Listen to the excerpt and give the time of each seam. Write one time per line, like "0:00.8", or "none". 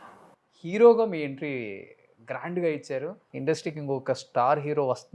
0:03.3